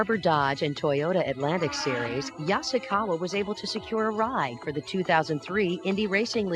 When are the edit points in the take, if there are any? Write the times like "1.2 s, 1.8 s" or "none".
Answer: 2.1 s